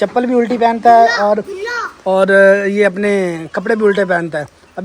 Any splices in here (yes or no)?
no